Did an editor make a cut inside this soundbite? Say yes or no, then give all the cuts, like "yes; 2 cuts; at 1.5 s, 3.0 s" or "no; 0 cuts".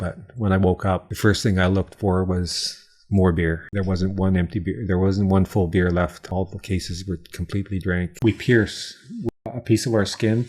yes; 5 cuts; at 1.1 s, 3.6 s, 6.2 s, 8.1 s, 9.4 s